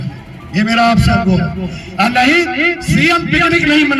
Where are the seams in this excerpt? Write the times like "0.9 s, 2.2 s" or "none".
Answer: none